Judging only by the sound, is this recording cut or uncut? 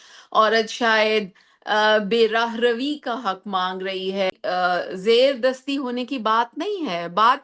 cut